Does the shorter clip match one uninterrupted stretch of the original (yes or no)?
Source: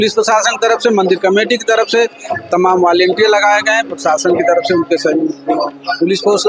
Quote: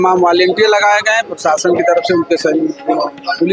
yes